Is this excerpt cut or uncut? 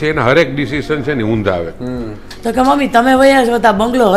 cut